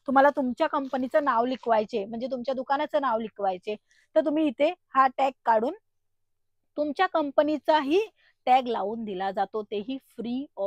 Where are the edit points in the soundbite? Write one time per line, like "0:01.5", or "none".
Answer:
none